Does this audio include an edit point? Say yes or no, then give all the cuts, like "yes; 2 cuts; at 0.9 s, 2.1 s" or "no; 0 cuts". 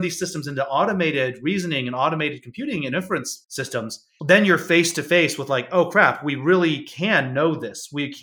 no; 0 cuts